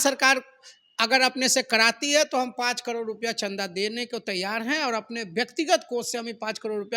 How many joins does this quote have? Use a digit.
0